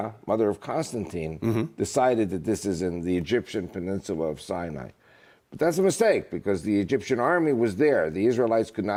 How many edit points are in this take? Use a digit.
0